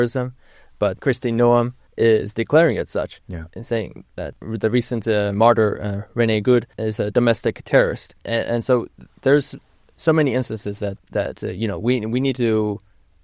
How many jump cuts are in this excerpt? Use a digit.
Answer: 6